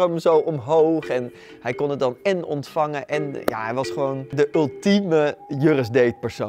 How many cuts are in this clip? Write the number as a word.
two